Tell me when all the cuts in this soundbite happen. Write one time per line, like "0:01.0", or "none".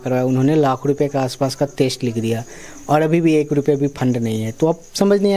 none